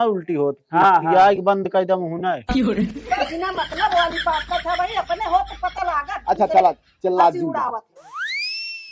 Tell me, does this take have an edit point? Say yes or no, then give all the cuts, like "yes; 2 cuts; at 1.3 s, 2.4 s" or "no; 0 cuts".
no; 0 cuts